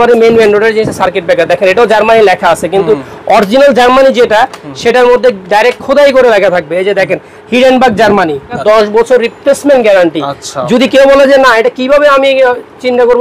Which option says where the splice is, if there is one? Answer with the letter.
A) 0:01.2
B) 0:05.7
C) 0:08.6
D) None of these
C